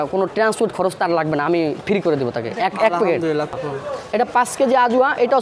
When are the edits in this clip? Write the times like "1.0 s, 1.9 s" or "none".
3.6 s